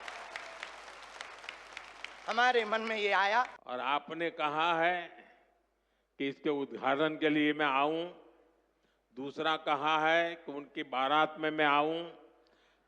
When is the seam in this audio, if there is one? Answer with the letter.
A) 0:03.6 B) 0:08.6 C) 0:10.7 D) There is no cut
A